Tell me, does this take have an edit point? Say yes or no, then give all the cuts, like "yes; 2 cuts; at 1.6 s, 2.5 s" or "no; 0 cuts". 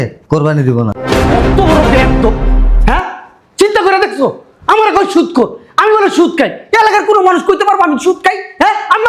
no; 0 cuts